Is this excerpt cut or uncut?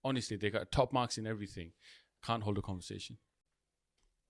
uncut